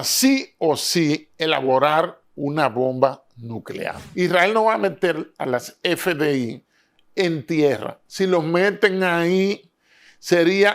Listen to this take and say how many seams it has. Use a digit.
1